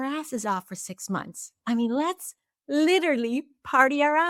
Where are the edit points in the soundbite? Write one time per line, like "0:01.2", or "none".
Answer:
none